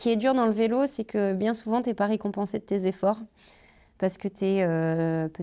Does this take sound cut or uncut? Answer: uncut